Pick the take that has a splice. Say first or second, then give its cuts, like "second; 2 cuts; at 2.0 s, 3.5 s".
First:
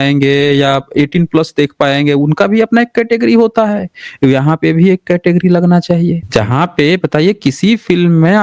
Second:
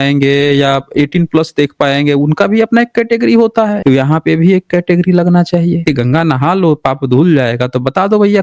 second; 2 cuts; at 3.8 s, 5.8 s